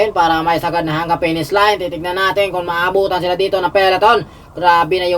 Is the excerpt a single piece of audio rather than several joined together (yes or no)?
yes